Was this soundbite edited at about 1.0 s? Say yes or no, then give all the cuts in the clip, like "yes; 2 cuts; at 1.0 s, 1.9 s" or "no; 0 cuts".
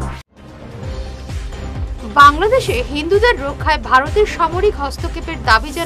yes; 1 cut; at 1.0 s